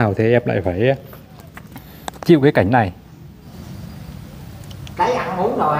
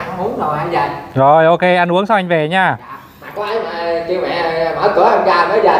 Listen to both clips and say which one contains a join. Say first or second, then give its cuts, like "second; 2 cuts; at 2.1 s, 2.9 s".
first; 1 cut; at 3.5 s